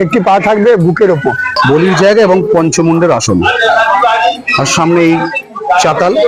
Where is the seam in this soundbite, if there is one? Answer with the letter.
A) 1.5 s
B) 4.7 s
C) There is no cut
A